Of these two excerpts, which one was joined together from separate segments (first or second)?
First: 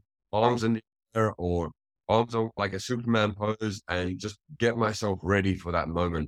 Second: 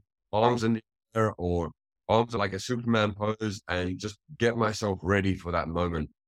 second